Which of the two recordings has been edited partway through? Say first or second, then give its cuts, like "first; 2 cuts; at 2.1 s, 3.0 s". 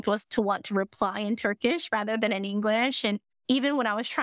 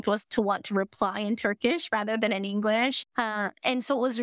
second; 1 cut; at 3.0 s